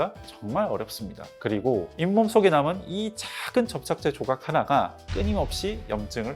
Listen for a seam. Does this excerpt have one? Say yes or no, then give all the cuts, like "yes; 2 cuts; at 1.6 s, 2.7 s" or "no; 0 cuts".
yes; 1 cut; at 5.1 s